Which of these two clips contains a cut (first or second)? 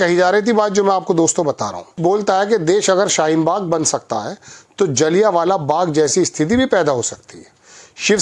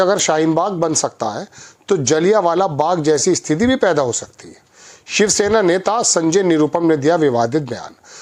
first